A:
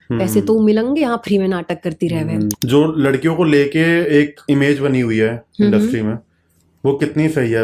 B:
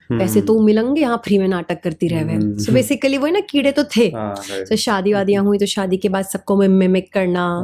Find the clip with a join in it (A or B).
A